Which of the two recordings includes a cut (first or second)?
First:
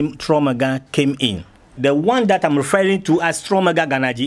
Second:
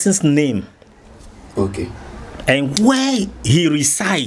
first